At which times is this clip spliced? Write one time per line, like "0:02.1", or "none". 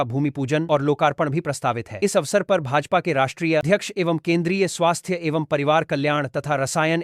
0:03.6